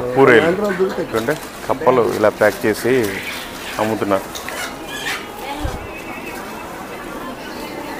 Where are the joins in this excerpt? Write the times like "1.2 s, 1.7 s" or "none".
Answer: 1.1 s